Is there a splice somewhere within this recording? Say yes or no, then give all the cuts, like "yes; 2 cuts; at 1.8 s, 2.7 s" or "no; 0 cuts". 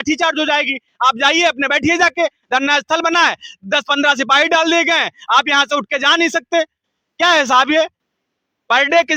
no; 0 cuts